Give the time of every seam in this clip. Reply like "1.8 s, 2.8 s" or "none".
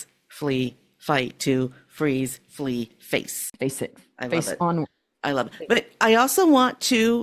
3.4 s